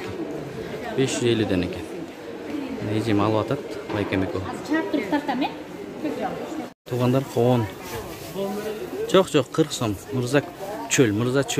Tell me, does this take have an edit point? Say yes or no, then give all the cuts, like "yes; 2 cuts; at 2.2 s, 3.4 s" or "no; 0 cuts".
yes; 1 cut; at 6.7 s